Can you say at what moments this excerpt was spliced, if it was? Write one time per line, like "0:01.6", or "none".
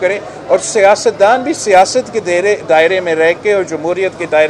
none